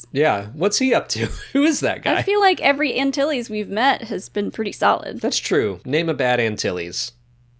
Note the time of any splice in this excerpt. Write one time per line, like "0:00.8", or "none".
0:05.8